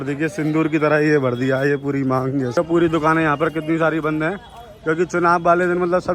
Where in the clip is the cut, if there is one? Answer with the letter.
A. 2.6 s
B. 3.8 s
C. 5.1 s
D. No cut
A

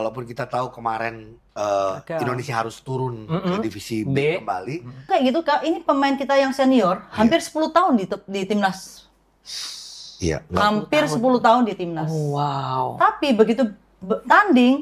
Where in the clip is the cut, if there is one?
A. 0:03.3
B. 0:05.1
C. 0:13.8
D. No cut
B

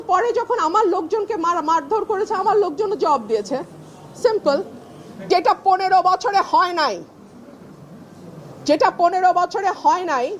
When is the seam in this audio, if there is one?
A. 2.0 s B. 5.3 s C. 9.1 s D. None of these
B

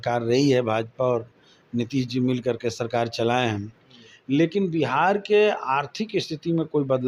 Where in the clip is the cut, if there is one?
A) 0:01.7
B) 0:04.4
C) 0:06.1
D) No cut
D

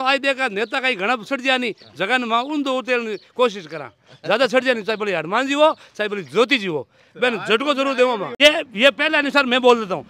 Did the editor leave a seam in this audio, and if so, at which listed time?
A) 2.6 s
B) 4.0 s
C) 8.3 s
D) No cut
C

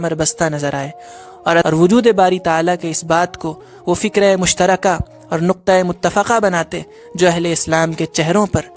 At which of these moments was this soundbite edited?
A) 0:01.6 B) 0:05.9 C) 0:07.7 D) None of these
A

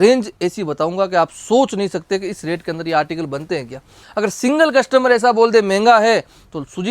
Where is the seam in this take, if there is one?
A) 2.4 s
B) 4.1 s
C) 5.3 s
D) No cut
B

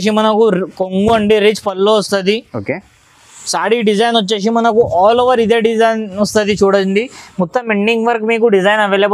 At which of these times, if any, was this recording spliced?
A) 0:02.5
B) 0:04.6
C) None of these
C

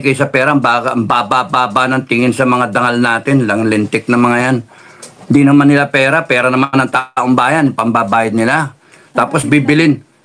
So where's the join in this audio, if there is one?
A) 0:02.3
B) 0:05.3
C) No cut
C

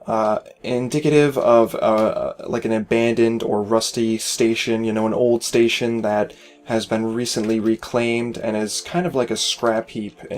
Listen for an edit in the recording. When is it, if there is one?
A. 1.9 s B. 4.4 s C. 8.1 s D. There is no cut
B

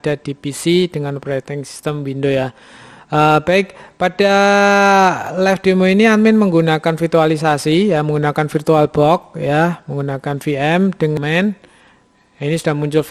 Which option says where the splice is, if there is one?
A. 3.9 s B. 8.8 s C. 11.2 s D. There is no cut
C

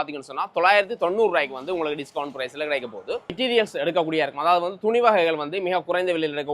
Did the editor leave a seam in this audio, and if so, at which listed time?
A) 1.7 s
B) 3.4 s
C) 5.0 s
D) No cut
B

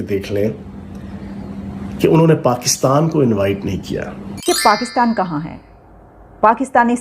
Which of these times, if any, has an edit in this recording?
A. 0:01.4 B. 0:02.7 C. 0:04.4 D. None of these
C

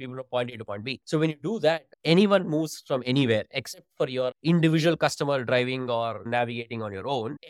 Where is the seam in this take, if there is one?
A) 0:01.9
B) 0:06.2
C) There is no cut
B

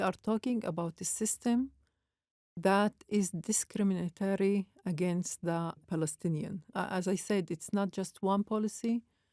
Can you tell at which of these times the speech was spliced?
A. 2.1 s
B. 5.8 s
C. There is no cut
B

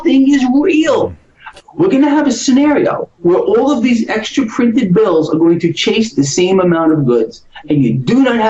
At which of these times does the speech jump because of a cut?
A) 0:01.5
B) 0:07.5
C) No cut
A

